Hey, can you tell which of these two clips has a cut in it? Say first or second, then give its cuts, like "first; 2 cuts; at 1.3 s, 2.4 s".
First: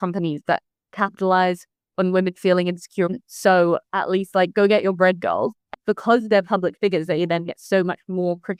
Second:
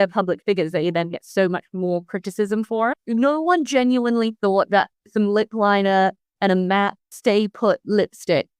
second; 1 cut; at 7.1 s